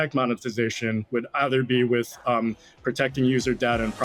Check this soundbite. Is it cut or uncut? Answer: uncut